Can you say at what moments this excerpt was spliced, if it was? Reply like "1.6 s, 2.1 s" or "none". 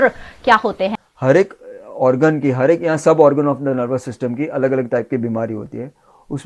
1.0 s